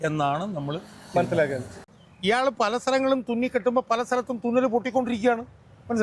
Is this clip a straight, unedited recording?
no; 1 cut; at 1.8 s

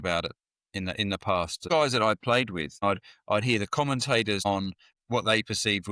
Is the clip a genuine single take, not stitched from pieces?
no; 3 cuts; at 1.7 s, 2.8 s, 4.6 s

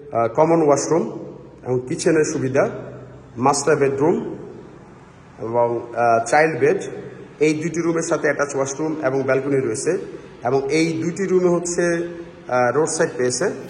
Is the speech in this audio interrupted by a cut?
no; 0 cuts

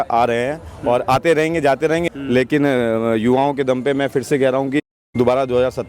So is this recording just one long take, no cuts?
no; 1 cut; at 2.0 s

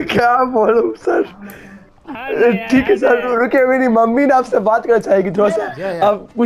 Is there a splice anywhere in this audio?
no; 0 cuts

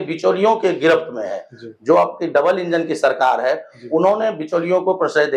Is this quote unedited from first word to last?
yes; 0 cuts

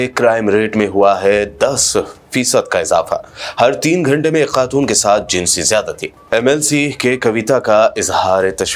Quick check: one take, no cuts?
yes; 0 cuts

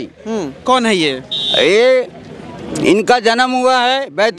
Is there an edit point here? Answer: no; 0 cuts

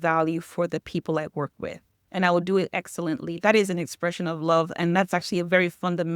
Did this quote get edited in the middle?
no; 0 cuts

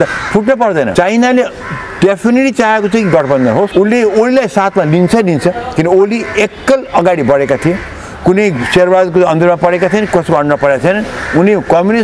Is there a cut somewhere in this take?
yes; 2 cuts; at 0.9 s, 3.7 s

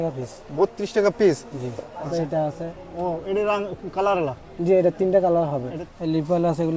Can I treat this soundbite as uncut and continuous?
no; 2 cuts; at 2.1 s, 5.8 s

